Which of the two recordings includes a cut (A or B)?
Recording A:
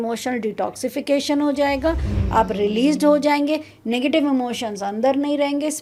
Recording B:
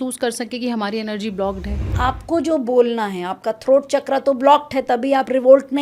B